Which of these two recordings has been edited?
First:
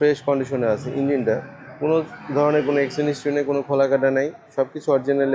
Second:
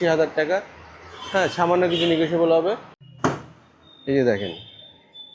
second; 1 cut; at 2.9 s

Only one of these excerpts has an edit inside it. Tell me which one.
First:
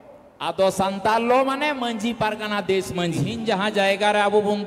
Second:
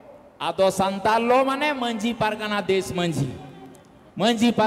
first; 1 cut; at 3.3 s

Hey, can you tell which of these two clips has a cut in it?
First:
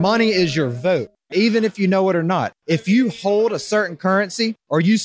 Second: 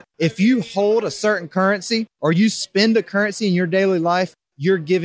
first; 1 cut; at 1.2 s

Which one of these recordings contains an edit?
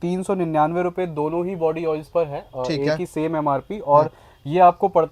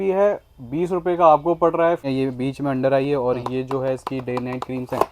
second; 1 cut; at 2.1 s

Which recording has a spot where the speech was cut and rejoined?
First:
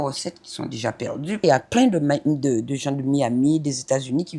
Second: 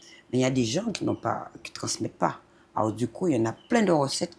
first; 1 cut; at 1.4 s

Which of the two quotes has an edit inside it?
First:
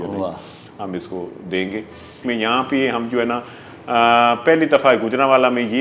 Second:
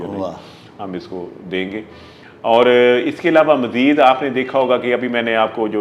first; 1 cut; at 2.2 s

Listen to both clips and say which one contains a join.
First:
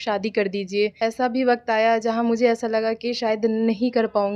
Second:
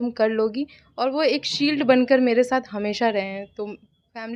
first; 1 cut; at 1.0 s

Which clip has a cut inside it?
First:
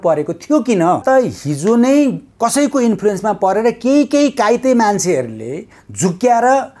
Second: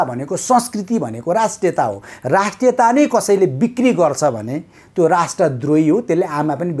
first; 2 cuts; at 1.0 s, 2.3 s

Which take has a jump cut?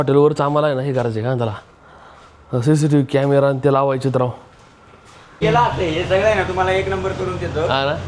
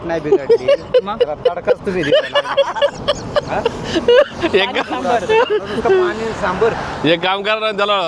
first; 1 cut; at 5.3 s

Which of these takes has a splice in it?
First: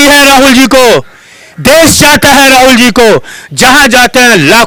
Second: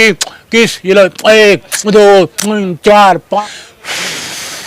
second; 1 cut; at 3.4 s

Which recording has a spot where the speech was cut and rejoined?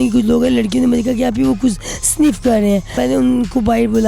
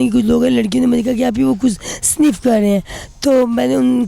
first; 1 cut; at 2.9 s

